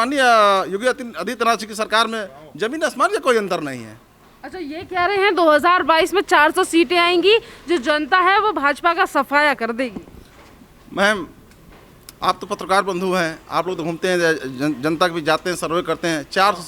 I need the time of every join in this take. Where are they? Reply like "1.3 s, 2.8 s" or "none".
none